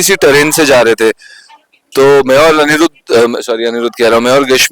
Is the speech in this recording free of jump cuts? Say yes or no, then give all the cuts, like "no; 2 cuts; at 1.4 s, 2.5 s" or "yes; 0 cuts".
yes; 0 cuts